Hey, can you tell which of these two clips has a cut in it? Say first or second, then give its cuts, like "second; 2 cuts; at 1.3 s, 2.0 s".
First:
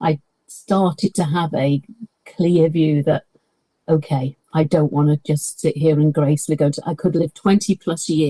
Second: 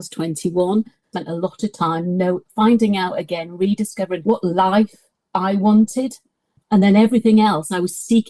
second; 3 cuts; at 1.1 s, 4.2 s, 6.5 s